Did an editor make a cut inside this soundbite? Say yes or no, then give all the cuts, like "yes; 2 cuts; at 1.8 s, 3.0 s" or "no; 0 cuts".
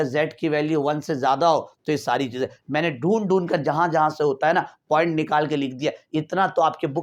no; 0 cuts